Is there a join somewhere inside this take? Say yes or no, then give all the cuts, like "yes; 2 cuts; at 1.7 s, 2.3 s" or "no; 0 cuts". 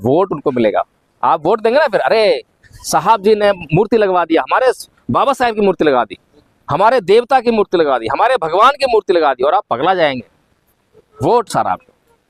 no; 0 cuts